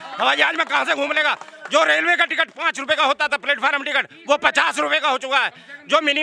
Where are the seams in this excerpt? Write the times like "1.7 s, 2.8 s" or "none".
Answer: none